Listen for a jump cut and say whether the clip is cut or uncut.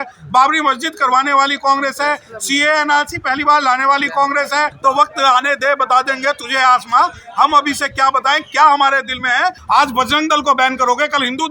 cut